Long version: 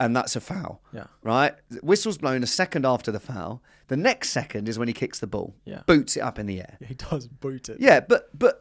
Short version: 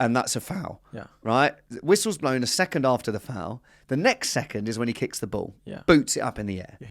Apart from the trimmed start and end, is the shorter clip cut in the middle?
no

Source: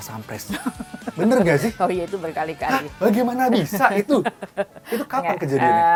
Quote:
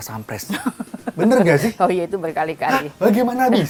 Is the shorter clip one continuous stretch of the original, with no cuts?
yes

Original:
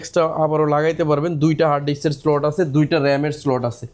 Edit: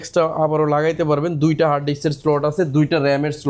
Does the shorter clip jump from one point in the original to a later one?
no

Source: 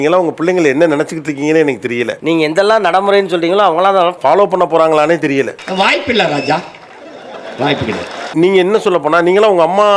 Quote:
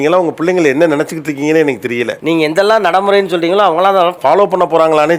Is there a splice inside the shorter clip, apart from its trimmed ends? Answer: no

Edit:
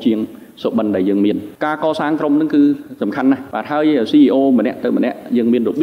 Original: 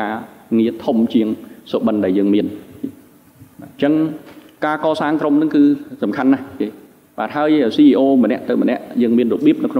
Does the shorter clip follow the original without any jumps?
no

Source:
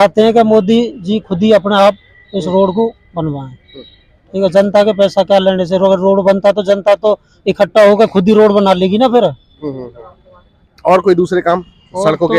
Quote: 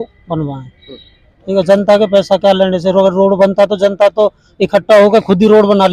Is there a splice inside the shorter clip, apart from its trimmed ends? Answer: no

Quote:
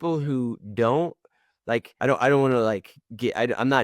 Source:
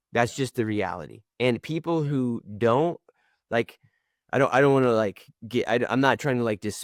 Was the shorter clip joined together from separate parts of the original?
yes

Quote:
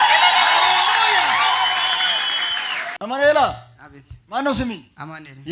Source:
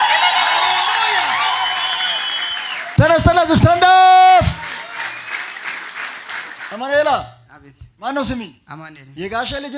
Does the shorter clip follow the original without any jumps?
no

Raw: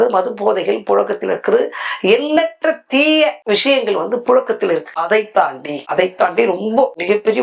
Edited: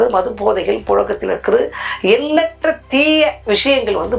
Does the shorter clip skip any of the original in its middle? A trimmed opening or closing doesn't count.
no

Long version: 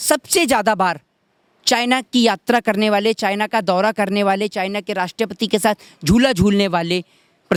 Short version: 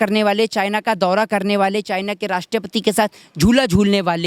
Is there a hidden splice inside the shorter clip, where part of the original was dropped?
no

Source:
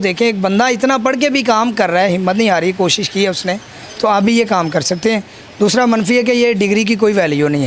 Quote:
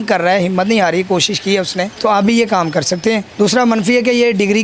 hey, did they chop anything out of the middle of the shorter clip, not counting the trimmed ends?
yes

